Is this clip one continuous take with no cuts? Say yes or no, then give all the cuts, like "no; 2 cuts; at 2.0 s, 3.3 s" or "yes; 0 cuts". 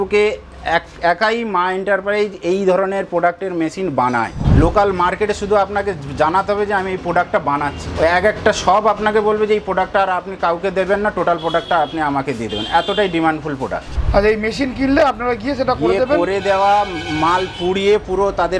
no; 2 cuts; at 4.4 s, 13.9 s